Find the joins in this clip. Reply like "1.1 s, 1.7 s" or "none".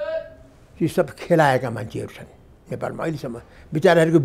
none